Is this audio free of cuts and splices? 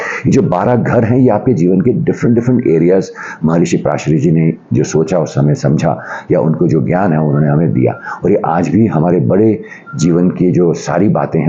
yes; 0 cuts

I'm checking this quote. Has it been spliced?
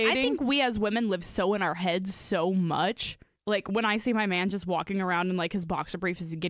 yes; 1 cut; at 3.3 s

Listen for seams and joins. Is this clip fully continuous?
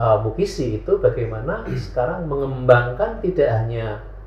yes; 0 cuts

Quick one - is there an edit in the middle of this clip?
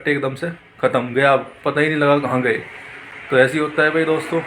no; 0 cuts

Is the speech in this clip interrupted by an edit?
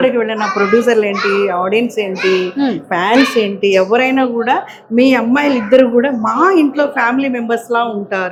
no; 0 cuts

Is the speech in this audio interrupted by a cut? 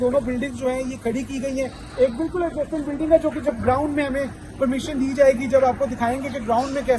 no; 0 cuts

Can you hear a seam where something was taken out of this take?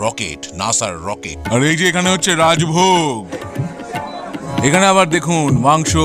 yes; 3 cuts; at 1.3 s, 3.3 s, 4.5 s

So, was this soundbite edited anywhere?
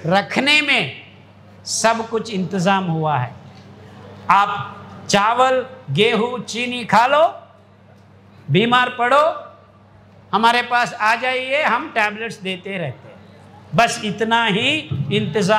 no; 0 cuts

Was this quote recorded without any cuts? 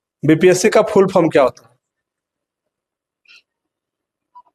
yes; 0 cuts

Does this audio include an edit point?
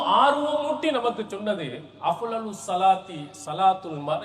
no; 0 cuts

